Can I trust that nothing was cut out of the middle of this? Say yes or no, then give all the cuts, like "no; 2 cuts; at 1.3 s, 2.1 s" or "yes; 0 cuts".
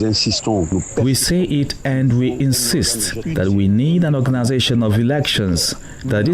no; 1 cut; at 3.2 s